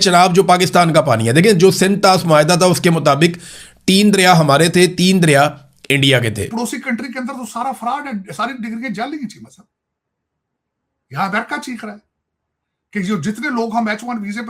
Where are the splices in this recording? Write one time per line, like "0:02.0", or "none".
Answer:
0:06.5